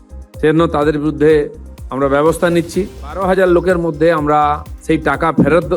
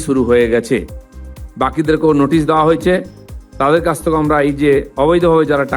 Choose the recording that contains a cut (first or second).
first